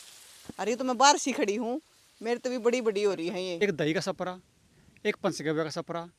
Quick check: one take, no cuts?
no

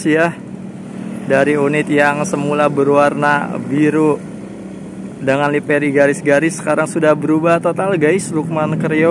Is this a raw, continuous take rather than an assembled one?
yes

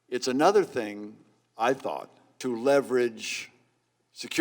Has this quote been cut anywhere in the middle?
yes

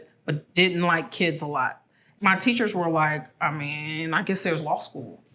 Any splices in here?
yes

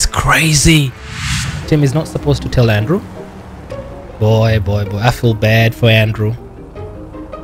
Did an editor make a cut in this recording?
yes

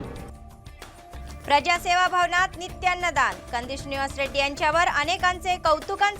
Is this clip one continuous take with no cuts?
no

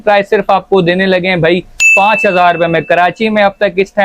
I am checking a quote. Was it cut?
no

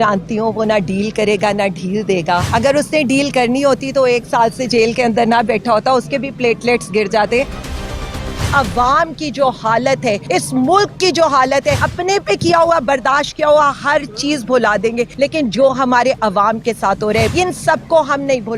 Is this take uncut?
no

